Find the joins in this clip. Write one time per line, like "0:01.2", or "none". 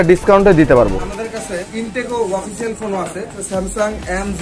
0:00.9
0:03.4